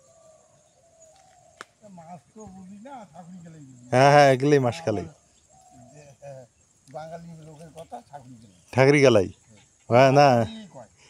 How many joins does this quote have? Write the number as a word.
zero